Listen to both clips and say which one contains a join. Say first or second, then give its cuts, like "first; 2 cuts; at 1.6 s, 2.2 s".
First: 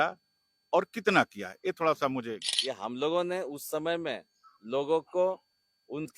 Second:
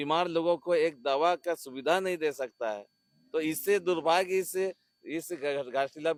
first; 1 cut; at 2.5 s